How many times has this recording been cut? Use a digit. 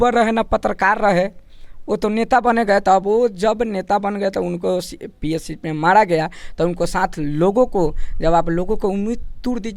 0